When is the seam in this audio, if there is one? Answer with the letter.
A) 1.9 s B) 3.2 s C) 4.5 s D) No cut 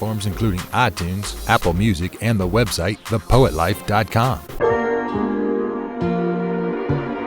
C